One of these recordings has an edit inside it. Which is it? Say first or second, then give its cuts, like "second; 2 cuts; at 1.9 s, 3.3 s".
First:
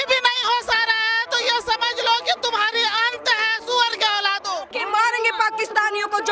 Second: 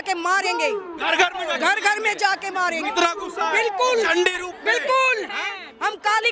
first; 1 cut; at 4.7 s